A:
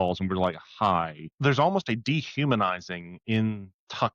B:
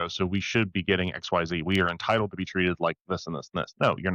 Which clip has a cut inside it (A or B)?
A